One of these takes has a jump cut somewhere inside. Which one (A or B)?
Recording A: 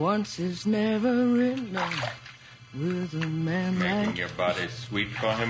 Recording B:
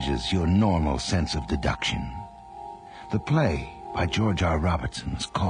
A